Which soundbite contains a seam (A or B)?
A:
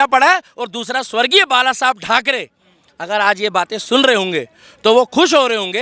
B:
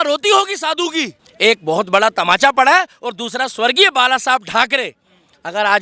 B